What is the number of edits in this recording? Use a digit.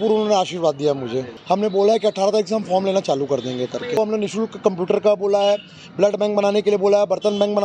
2